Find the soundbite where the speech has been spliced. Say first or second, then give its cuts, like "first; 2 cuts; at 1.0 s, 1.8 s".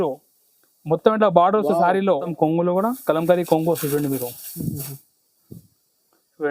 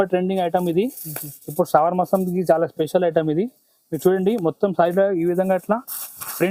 first; 1 cut; at 2.3 s